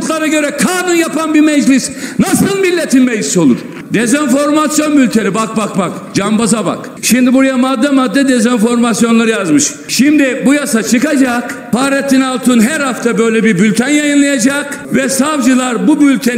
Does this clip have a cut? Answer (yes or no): yes